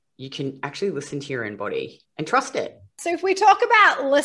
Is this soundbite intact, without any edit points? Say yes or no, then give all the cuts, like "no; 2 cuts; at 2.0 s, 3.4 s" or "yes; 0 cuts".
no; 2 cuts; at 2.0 s, 2.9 s